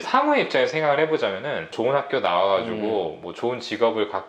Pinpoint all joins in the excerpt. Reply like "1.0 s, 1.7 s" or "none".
1.7 s